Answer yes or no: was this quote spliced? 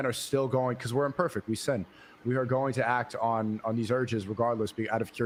no